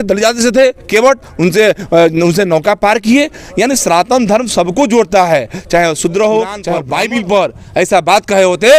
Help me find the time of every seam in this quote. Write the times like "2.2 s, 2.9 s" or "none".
6.7 s